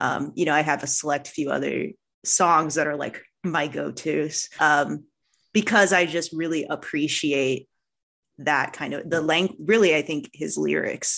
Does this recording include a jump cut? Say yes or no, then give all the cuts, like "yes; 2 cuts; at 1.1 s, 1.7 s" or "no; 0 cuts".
yes; 1 cut; at 4.6 s